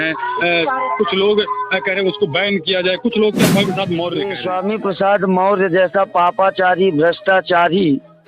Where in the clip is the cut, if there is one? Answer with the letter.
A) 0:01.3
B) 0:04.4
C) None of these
B